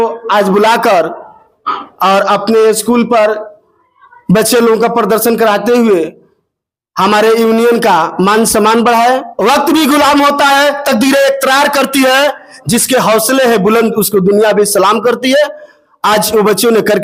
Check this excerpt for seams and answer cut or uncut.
uncut